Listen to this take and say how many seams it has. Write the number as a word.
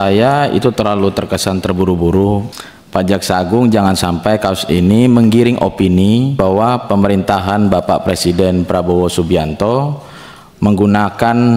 two